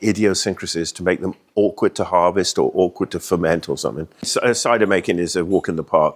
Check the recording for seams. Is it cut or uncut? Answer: cut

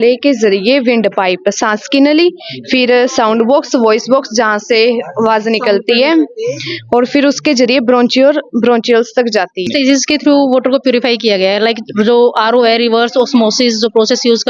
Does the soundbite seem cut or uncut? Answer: cut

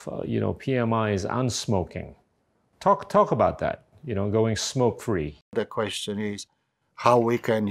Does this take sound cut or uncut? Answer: cut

